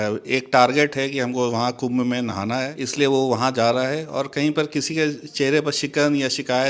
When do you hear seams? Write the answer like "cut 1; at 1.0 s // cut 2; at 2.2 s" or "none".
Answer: cut 1; at 2.8 s